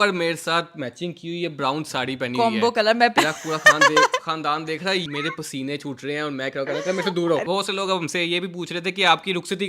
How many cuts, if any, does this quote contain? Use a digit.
3